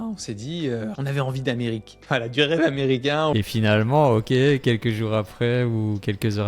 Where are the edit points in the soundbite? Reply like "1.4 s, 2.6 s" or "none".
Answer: 1.0 s, 3.3 s